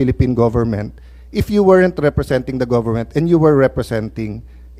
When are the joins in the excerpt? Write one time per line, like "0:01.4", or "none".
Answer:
none